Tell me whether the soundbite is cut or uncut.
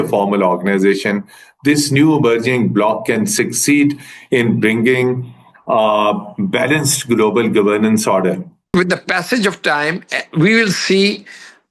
cut